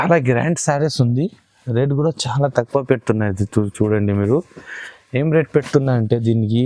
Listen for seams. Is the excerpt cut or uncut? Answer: uncut